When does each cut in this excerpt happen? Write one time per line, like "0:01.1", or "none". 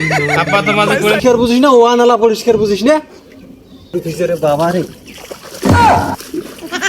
0:01.2
0:04.0

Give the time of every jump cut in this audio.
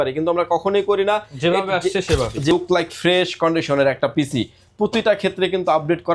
0:02.5

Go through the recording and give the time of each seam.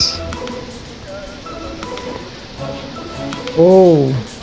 none

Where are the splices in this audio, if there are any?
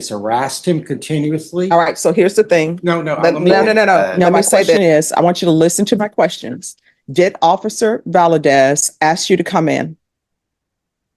0:04.8

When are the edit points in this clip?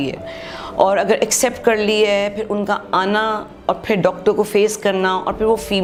none

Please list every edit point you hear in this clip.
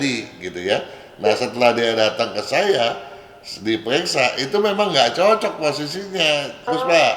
none

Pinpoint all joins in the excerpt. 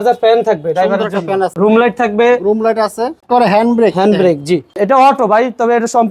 0:01.5
0:03.2
0:04.8

